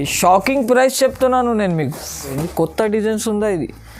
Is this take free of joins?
no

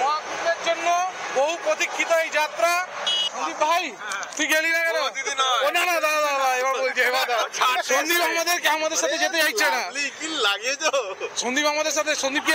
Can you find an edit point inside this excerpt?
yes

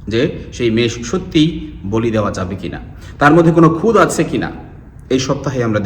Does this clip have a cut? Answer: no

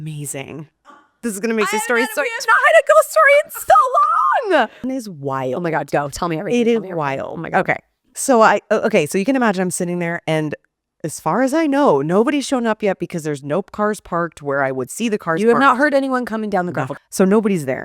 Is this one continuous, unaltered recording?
no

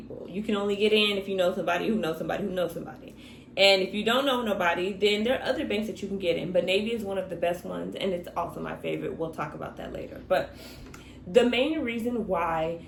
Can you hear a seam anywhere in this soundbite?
no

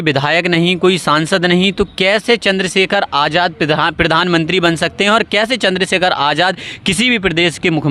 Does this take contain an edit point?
no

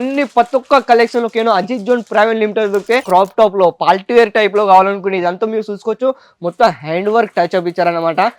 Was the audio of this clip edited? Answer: yes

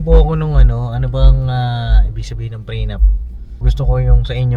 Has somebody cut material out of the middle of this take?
yes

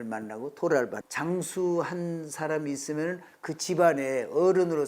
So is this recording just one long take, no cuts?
no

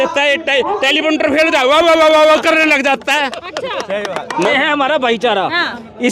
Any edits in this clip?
yes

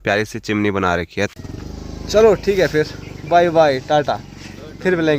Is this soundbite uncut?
no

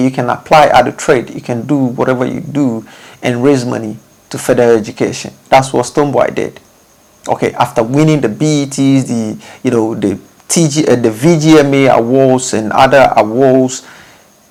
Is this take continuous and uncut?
yes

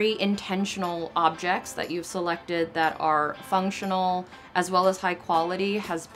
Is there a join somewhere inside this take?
no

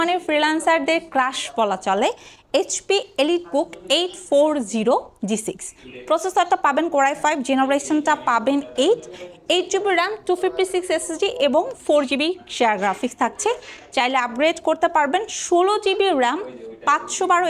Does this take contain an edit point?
no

